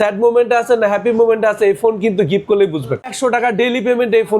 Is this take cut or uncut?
cut